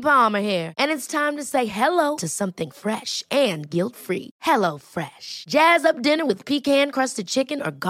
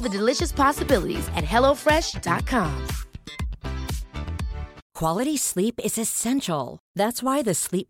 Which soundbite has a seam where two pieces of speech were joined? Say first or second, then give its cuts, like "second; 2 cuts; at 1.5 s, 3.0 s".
second; 1 cut; at 4.9 s